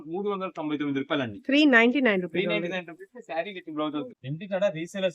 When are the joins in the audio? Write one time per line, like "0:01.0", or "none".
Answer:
0:04.1